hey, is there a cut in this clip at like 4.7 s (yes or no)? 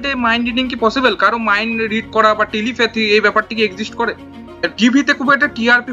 yes